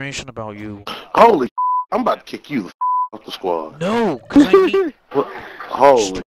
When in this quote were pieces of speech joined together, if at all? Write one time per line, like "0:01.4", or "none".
0:00.9